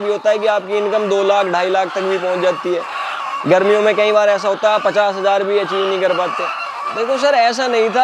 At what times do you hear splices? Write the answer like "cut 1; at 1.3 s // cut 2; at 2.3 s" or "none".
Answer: cut 1; at 7.0 s